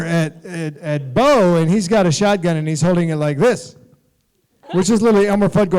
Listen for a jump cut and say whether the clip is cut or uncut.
cut